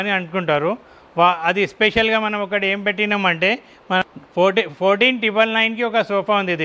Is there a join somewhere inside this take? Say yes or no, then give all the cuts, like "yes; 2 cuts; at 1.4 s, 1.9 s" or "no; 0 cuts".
yes; 1 cut; at 4.1 s